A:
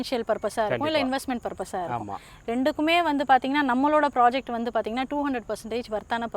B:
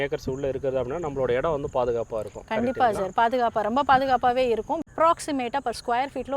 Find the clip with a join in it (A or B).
B